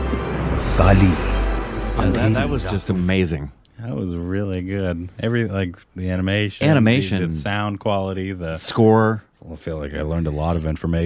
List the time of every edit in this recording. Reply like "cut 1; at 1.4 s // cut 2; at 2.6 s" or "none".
cut 1; at 2.4 s